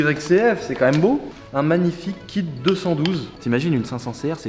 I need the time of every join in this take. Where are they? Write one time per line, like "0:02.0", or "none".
0:01.3
0:03.3